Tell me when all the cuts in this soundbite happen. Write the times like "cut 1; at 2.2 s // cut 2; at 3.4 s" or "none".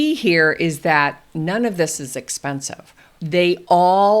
cut 1; at 3.2 s